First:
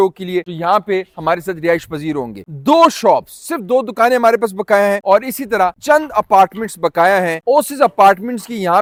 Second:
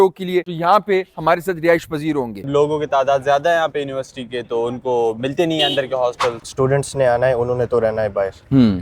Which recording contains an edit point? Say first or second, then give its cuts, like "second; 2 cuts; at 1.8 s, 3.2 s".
second; 2 cuts; at 2.4 s, 6.4 s